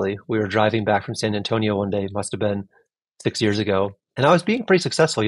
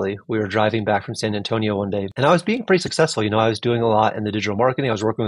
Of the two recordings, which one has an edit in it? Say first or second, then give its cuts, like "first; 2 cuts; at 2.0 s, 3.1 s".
second; 1 cut; at 2.1 s